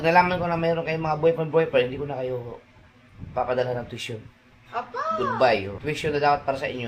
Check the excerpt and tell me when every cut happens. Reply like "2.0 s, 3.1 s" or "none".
5.8 s